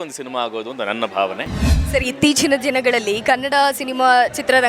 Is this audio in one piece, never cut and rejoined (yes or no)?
no